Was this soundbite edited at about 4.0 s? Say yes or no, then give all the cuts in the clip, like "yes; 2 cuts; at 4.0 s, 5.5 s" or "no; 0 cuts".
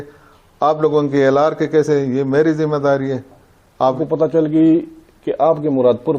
yes; 1 cut; at 4.0 s